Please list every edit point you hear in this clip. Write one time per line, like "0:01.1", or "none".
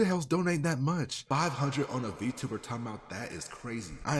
0:01.2

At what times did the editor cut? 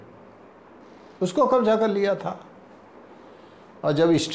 none

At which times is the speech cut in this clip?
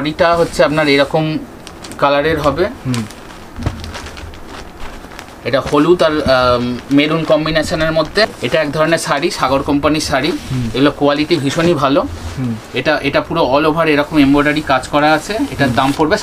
0:08.3

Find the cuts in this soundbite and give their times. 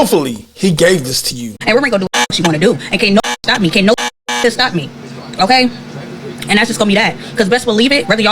0:01.6

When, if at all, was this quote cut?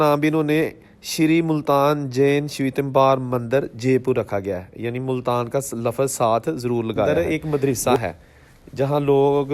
0:07.1

